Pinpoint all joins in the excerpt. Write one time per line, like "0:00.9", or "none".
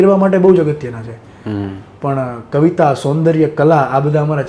none

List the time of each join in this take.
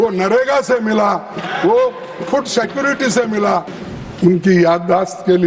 0:03.7

